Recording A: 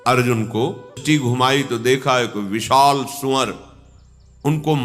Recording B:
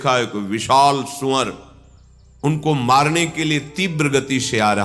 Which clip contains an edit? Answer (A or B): A